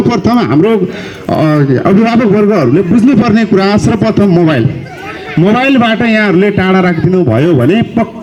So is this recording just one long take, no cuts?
yes; 0 cuts

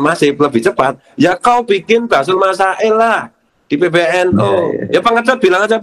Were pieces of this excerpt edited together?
yes; 1 cut; at 4.8 s

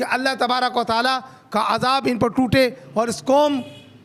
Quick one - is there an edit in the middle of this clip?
no; 0 cuts

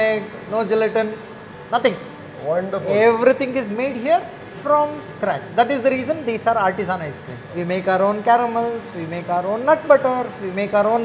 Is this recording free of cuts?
yes; 0 cuts

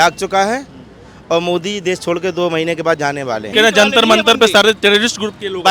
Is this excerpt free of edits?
no; 1 cut; at 3.5 s

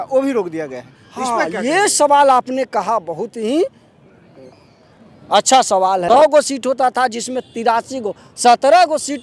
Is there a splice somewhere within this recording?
yes; 1 cut; at 6.0 s

